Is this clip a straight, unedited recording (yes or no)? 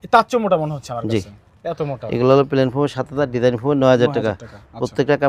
yes